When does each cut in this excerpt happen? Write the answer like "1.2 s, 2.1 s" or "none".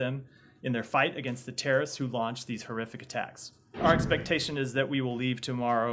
3.7 s

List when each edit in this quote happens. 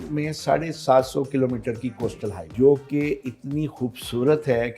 2.5 s

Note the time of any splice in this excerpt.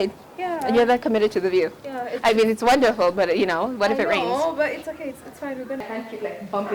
5.8 s

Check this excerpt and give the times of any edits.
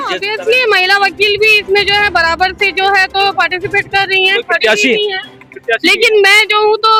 none

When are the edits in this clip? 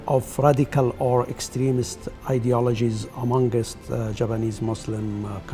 none

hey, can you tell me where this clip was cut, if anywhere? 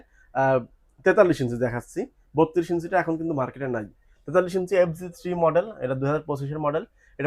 none

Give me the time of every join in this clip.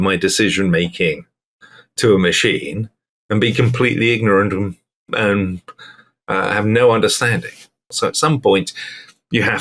7.8 s

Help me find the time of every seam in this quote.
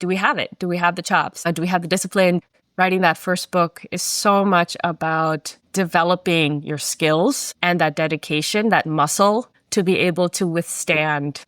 1.4 s, 2.5 s

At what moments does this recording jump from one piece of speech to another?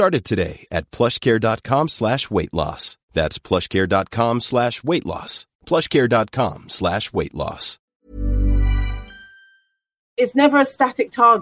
10.0 s

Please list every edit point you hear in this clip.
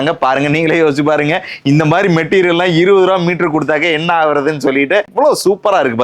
5.1 s

